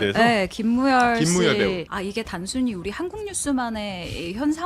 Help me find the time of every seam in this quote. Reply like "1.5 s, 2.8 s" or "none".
1.9 s